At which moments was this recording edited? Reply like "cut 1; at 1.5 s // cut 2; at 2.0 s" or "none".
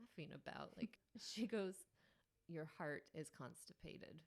cut 1; at 1.0 s // cut 2; at 2.3 s